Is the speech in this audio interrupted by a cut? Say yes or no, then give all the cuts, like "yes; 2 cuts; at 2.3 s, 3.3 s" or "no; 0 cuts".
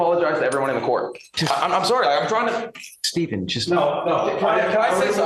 no; 0 cuts